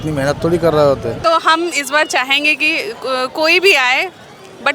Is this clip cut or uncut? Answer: cut